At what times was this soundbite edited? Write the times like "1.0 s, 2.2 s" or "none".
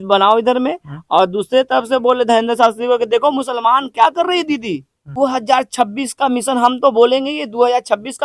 5.0 s